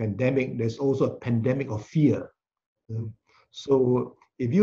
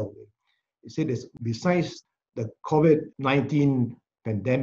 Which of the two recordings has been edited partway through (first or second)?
second